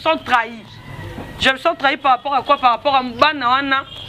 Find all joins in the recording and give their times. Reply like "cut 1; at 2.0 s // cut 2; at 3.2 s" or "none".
none